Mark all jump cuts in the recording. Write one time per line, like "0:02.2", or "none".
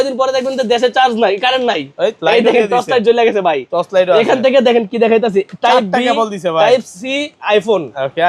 none